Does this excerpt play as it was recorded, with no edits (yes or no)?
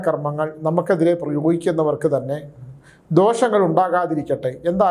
yes